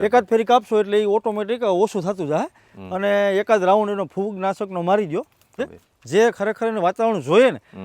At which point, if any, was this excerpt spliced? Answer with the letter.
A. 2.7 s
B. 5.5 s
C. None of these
B